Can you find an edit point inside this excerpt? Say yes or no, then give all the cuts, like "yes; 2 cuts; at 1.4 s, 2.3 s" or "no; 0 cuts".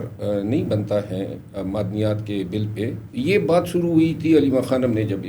yes; 1 cut; at 3.1 s